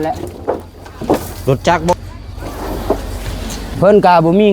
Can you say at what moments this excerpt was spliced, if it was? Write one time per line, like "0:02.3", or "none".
0:01.9